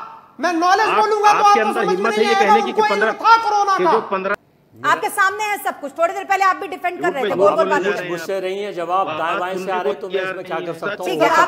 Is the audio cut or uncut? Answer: cut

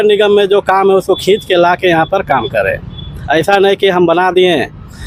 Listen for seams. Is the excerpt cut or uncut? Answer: uncut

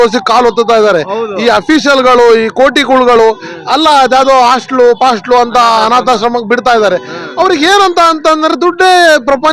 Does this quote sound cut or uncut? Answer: uncut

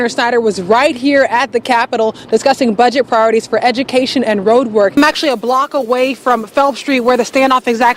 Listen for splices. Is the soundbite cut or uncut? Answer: cut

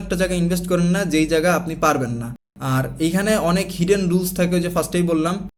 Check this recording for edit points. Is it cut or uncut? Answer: uncut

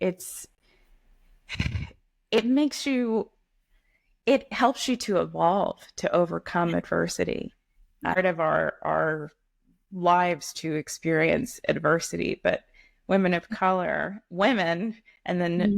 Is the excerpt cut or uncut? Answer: cut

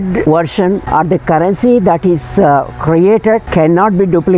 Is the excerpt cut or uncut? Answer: uncut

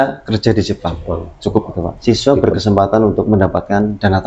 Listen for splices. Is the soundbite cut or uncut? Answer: cut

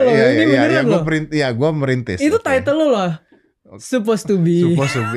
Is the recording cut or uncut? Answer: uncut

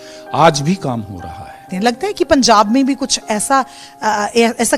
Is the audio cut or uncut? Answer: cut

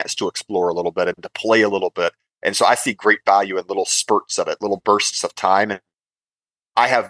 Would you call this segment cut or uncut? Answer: uncut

